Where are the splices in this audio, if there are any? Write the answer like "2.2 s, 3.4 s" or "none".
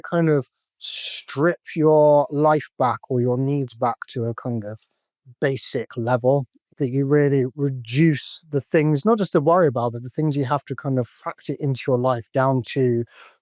none